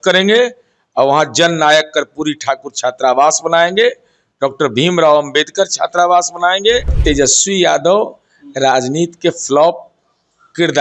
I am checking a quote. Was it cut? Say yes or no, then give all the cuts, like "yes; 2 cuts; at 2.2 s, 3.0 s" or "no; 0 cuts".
yes; 1 cut; at 7.0 s